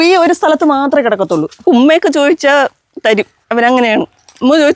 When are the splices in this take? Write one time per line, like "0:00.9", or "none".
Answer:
0:01.5
0:03.4